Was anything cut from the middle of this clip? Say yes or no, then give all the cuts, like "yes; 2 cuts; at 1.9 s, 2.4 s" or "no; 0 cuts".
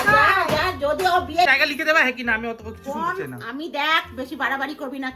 yes; 1 cut; at 1.5 s